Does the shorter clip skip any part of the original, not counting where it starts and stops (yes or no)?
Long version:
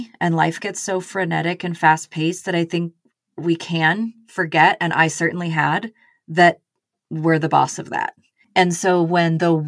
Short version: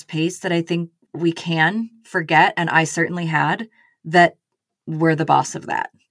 yes